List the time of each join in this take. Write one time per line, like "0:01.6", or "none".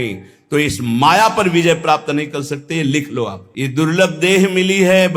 0:03.4